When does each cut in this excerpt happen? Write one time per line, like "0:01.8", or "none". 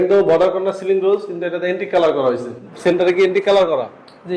0:02.7